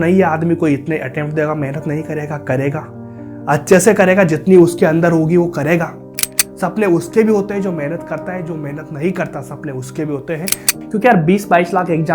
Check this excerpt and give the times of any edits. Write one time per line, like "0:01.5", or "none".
0:10.8